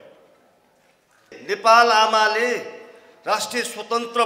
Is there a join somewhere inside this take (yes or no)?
yes